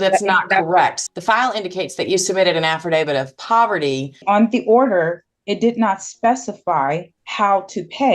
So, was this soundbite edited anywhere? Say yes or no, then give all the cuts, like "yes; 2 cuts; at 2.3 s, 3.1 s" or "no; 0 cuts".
yes; 3 cuts; at 1.0 s, 4.2 s, 7.2 s